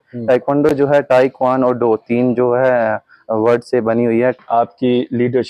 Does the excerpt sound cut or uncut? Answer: cut